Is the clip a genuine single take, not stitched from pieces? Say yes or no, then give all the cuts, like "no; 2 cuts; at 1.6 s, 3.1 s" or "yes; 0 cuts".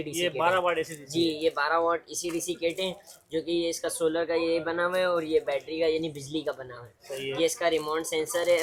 yes; 0 cuts